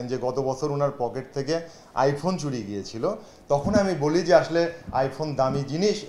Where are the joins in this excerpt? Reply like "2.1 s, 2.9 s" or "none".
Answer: none

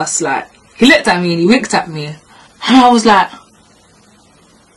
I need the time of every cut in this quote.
none

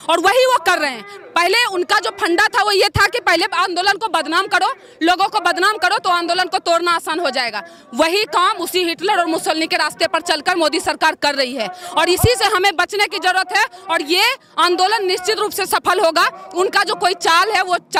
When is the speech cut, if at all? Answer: none

